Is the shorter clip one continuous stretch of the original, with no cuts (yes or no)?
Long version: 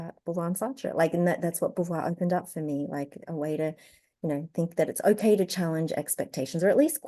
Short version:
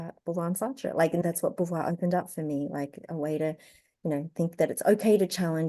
no